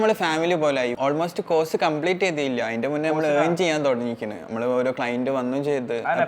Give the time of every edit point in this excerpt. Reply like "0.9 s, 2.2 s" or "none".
0.9 s